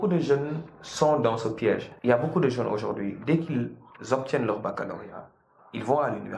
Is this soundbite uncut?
no; 1 cut; at 1.9 s

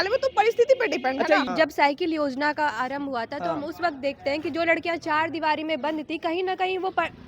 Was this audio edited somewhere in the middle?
yes; 1 cut; at 1.5 s

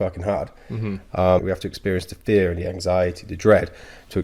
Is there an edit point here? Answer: yes; 1 cut; at 1.4 s

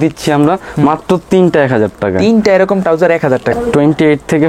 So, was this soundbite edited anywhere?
yes; 1 cut; at 3.5 s

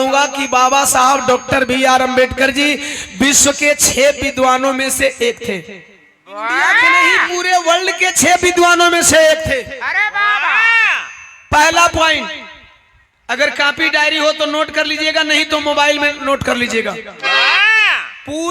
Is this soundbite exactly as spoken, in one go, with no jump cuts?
no; 1 cut; at 7.2 s

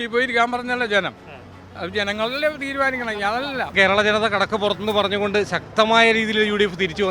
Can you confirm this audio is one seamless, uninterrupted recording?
no; 1 cut; at 3.7 s

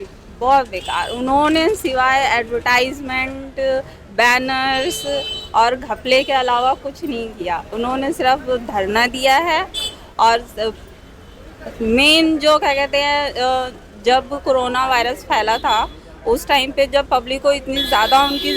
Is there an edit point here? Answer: no; 0 cuts

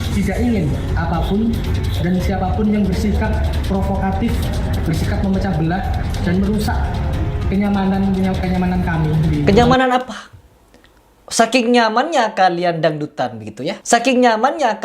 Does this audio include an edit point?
yes; 1 cut; at 13.8 s

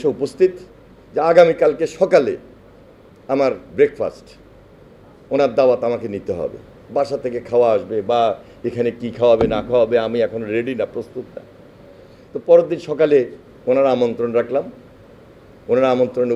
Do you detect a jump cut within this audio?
no; 0 cuts

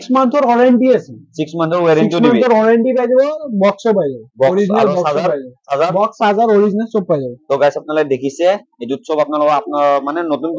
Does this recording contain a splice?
no; 0 cuts

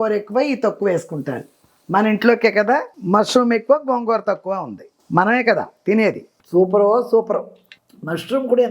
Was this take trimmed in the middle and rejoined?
yes; 1 cut; at 6.4 s

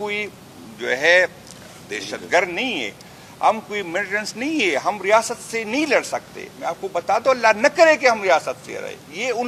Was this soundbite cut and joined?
no; 0 cuts

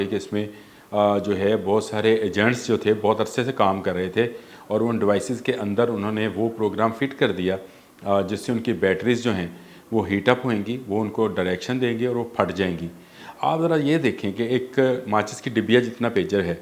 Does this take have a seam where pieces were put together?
no; 0 cuts

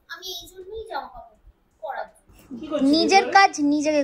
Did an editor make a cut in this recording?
yes; 1 cut; at 2.3 s

